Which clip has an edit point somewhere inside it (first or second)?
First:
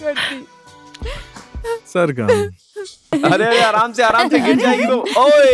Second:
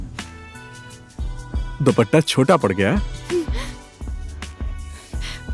first